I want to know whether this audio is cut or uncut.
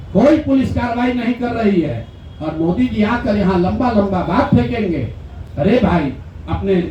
uncut